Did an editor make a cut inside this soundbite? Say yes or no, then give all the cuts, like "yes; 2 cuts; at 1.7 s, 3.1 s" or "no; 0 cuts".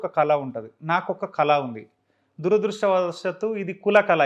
no; 0 cuts